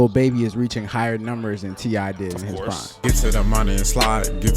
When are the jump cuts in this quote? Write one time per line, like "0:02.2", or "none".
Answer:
0:02.9